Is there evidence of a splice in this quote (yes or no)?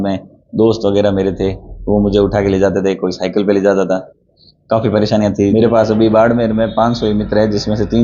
yes